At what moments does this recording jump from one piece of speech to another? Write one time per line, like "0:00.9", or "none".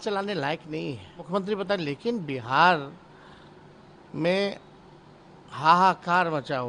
0:01.3

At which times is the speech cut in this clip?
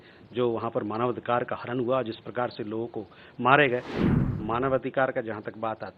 0:04.0

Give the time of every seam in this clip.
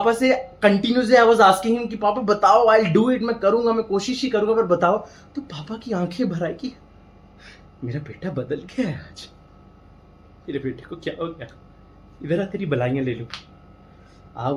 none

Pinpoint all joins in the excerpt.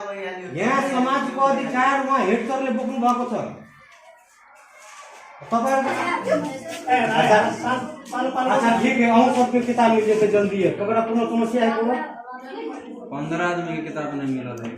0:05.9

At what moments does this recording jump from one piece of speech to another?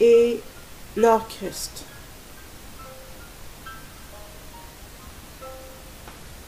0:03.8

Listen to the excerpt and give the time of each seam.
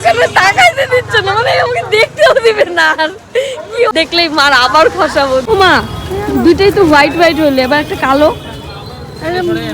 0:03.9
0:05.4

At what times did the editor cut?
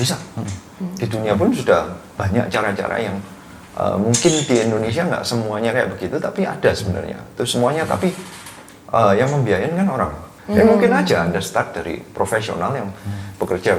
0:10.3

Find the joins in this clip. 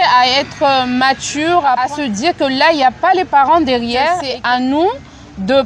0:01.8
0:04.3

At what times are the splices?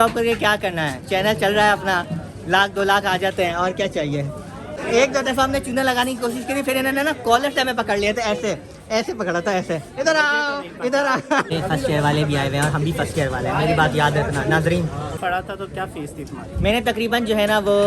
0:04.8
0:11.5
0:15.1

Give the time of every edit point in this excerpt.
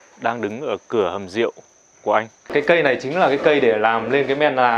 0:02.4

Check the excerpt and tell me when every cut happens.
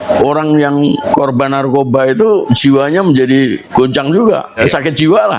0:01.0
0:02.4
0:03.6
0:04.6

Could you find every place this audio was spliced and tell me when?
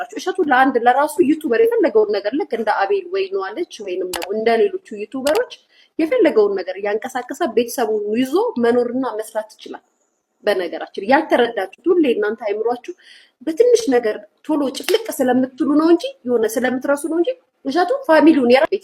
none

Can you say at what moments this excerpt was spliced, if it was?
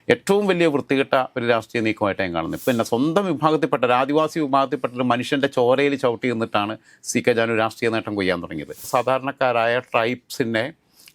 0:02.6
0:08.8

